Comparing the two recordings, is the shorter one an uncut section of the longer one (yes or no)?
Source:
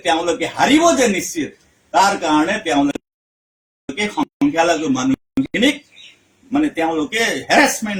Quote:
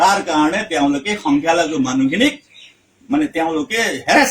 no